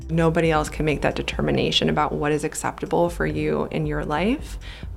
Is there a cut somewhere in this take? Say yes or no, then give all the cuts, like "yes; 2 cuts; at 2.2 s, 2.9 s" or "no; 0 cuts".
no; 0 cuts